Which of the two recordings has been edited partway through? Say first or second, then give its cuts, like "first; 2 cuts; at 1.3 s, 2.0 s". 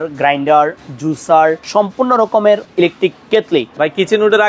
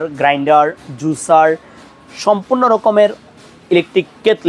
first; 3 cuts; at 1.6 s, 2.7 s, 3.7 s